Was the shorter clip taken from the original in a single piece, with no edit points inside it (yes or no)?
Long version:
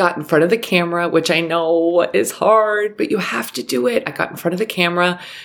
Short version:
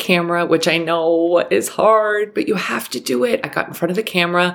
yes